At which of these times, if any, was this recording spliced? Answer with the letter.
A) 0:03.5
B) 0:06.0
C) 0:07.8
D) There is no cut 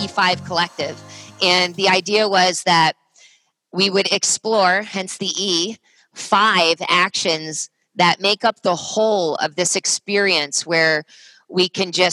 D